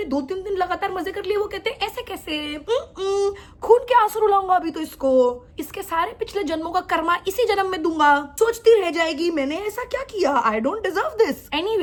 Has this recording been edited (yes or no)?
no